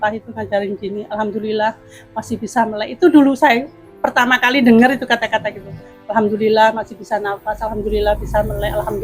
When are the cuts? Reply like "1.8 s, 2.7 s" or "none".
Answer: none